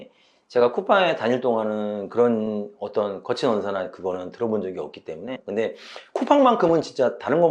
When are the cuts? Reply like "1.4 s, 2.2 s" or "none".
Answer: 5.4 s